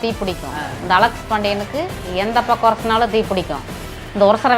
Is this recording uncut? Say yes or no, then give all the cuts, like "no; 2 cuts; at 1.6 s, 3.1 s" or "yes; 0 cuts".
yes; 0 cuts